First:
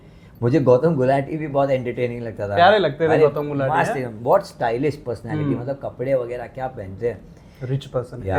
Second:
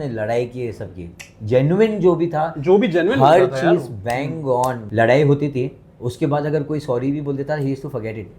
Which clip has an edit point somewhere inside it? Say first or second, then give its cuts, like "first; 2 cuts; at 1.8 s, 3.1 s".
second; 1 cut; at 4.8 s